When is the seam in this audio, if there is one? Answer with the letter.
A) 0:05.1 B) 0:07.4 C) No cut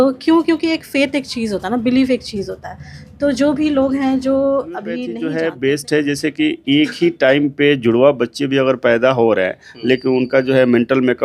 A